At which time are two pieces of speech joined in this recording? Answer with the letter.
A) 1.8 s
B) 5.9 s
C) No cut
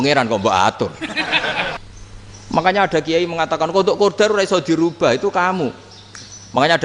A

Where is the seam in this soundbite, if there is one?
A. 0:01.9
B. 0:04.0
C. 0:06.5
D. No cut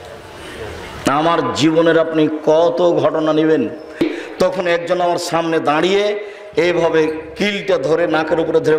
B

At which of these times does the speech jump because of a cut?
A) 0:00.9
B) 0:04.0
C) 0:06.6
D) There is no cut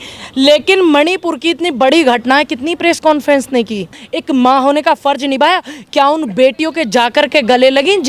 B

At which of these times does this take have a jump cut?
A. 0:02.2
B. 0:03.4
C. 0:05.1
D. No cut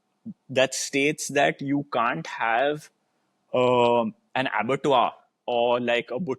D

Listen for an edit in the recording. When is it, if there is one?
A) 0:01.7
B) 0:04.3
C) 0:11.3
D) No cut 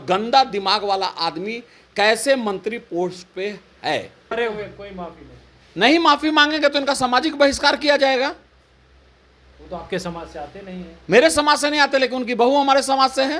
B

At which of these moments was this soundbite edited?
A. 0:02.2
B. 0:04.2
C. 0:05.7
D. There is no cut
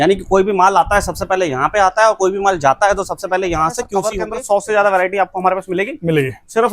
B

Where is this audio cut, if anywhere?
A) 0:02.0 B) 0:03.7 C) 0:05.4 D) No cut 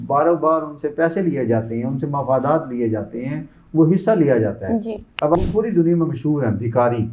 C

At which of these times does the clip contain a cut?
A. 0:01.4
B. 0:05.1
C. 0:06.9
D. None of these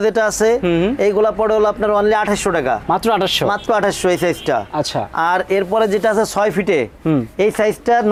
D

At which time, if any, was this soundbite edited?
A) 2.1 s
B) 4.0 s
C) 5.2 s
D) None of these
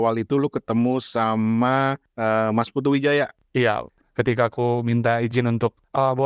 B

